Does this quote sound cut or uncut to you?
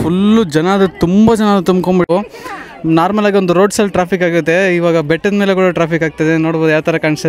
cut